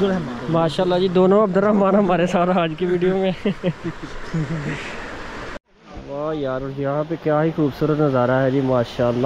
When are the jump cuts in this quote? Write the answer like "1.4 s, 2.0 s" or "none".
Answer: 5.6 s